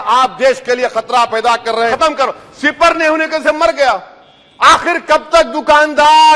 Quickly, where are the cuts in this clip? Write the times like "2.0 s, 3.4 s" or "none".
1.9 s